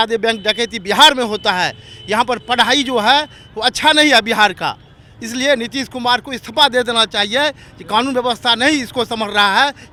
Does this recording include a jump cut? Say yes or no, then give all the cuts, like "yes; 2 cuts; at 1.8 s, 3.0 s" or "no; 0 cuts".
no; 0 cuts